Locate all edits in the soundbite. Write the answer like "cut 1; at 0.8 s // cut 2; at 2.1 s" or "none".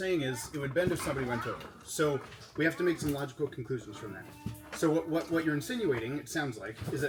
none